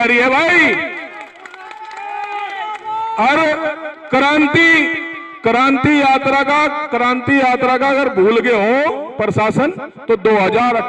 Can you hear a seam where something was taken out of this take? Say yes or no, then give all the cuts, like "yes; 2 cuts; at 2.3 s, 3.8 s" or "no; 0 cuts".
no; 0 cuts